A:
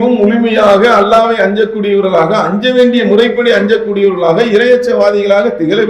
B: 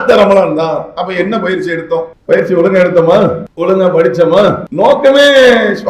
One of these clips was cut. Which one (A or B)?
B